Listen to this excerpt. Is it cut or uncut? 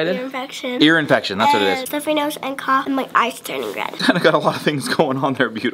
cut